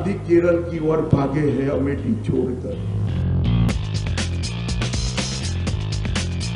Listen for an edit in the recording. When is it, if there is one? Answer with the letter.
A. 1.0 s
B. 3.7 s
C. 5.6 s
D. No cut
B